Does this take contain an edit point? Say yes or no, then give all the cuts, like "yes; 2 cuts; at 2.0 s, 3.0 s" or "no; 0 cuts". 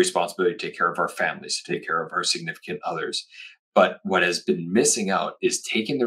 yes; 1 cut; at 2.1 s